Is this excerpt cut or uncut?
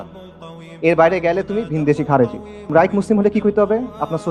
cut